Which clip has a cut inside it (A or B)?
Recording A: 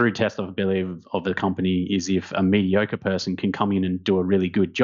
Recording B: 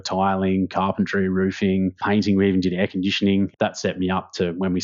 B